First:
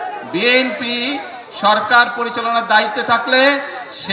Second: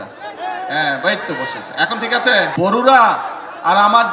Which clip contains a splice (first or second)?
second